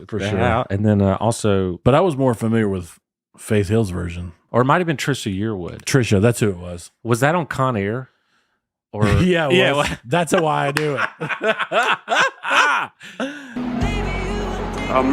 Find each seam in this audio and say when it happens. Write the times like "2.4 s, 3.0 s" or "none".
4.5 s